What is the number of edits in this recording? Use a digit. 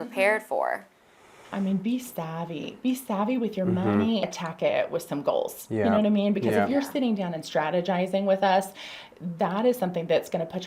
1